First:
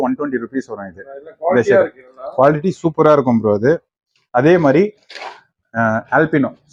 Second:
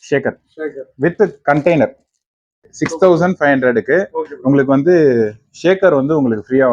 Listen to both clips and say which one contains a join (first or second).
second